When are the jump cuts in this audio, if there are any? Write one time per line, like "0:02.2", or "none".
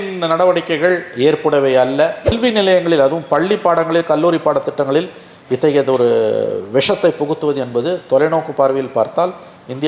0:02.3